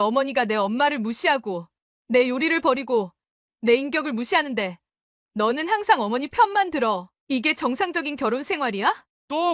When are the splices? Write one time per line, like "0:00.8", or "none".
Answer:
none